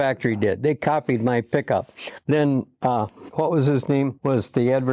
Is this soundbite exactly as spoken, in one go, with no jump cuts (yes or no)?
no